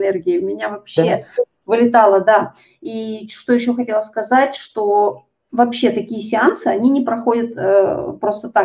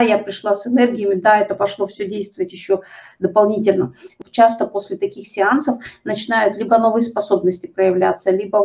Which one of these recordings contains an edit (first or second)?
second